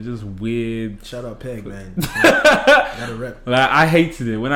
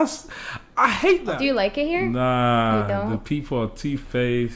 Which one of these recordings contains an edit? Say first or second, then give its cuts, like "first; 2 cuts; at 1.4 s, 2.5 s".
second; 1 cut; at 1.3 s